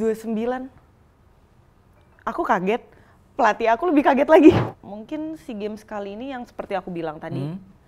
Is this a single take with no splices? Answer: no; 1 cut; at 4.8 s

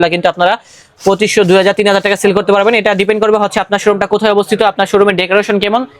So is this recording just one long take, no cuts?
yes; 0 cuts

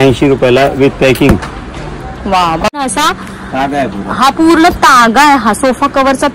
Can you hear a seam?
yes; 1 cut; at 2.8 s

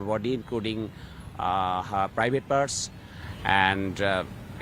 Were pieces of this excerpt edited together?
no; 0 cuts

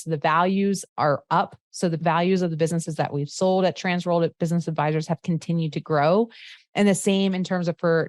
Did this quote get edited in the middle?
yes; 2 cuts; at 0.9 s, 2.0 s

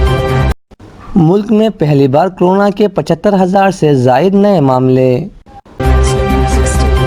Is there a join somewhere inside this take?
yes; 1 cut; at 5.7 s

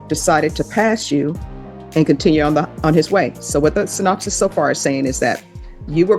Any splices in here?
no; 0 cuts

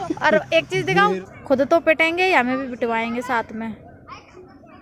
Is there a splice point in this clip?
yes; 1 cut; at 1.2 s

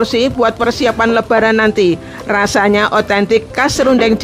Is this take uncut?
yes; 0 cuts

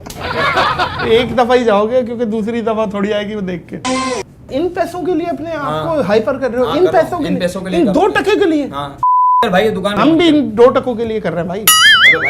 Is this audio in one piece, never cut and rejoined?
no; 1 cut; at 4.5 s

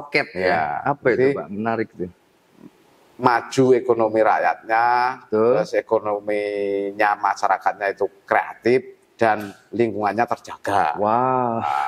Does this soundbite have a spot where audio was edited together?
no; 0 cuts

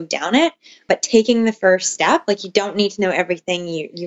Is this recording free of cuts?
yes; 0 cuts

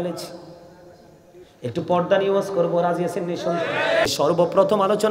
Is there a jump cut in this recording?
yes; 1 cut; at 4.1 s

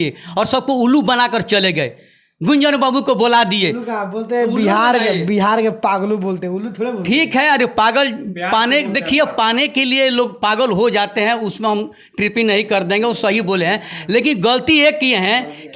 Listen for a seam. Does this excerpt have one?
no; 0 cuts

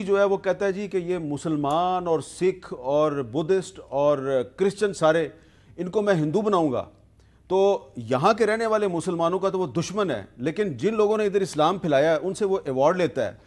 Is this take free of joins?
yes; 0 cuts

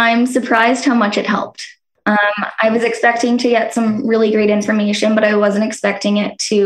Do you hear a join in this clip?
yes; 1 cut; at 2.2 s

